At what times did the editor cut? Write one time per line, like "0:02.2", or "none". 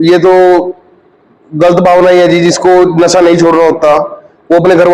none